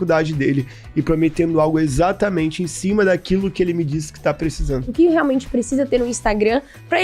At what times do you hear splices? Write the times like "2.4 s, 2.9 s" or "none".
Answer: 4.9 s